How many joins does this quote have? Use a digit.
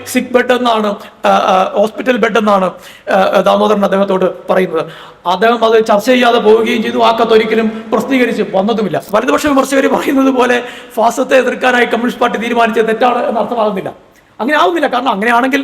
1